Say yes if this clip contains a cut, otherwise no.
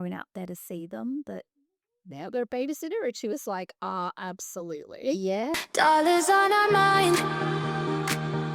yes